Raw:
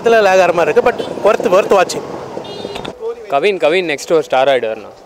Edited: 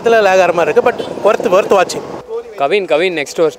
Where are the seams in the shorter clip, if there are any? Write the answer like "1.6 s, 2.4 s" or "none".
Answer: 2.2 s